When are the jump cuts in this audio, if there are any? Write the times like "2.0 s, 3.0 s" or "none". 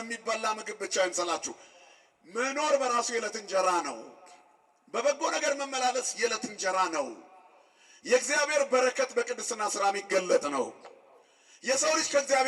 none

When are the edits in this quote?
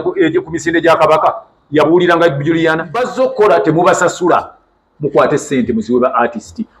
3.1 s

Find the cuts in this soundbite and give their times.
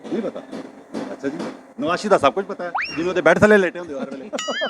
none

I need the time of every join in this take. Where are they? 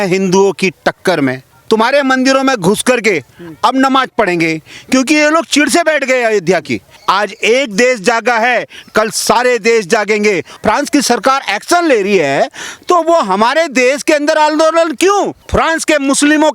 1.5 s, 6.9 s, 10.5 s, 15.4 s

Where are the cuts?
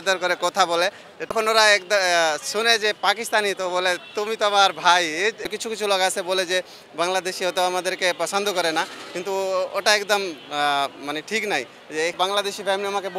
1.3 s, 5.5 s, 12.1 s

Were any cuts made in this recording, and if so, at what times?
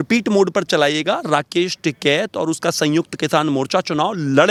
none

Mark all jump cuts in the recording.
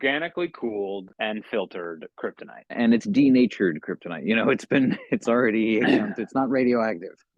1.1 s, 2.7 s

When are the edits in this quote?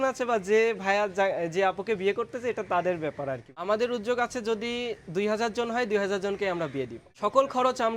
3.5 s, 7.0 s

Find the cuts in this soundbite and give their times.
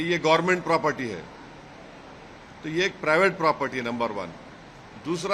none

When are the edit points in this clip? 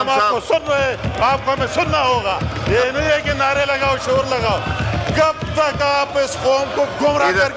none

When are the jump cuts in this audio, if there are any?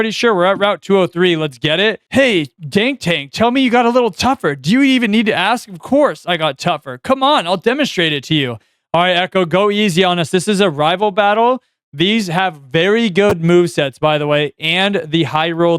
none

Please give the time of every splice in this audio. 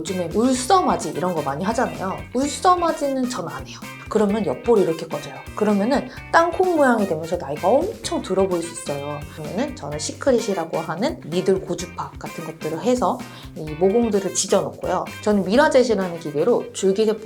3.9 s, 9.4 s, 15.1 s

